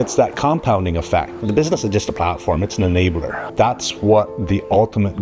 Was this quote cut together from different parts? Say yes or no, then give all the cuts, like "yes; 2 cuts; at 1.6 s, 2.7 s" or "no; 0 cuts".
yes; 2 cuts; at 1.3 s, 3.4 s